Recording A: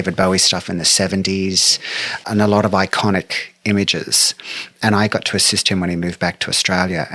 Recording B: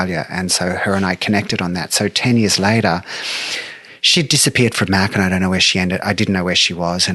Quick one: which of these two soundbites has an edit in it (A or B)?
A